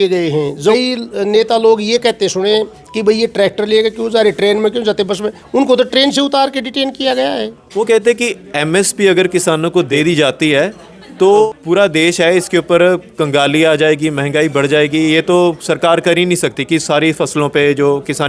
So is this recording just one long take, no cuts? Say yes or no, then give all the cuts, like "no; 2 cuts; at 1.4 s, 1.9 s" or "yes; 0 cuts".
no; 4 cuts; at 0.7 s, 7.6 s, 9.9 s, 11.5 s